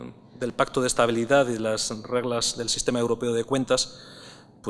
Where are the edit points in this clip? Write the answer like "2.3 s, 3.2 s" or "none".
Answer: 3.1 s